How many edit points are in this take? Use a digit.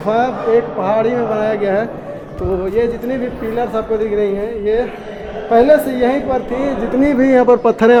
0